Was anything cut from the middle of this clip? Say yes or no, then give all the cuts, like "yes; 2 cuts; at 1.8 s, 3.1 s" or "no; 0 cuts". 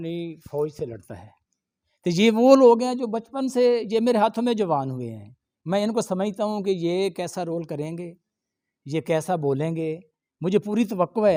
no; 0 cuts